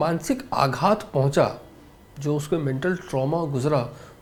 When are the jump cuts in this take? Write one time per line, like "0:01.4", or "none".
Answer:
none